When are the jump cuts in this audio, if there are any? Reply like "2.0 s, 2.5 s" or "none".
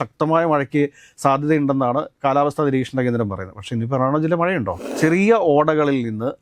4.9 s